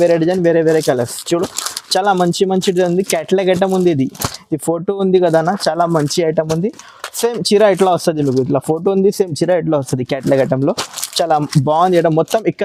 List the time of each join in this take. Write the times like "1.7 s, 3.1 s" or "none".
none